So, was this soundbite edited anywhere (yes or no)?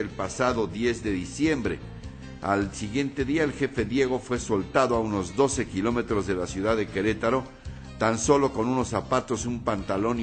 no